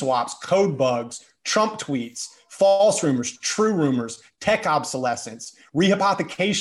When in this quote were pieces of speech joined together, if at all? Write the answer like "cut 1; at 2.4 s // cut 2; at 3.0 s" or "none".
none